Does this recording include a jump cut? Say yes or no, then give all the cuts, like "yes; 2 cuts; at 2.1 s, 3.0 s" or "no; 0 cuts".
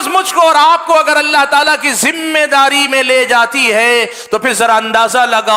no; 0 cuts